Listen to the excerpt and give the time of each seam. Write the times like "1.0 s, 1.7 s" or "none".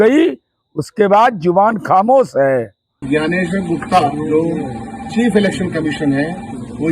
3.0 s

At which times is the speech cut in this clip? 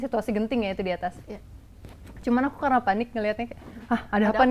none

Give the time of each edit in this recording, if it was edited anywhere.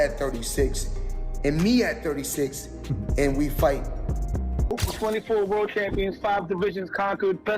4.7 s

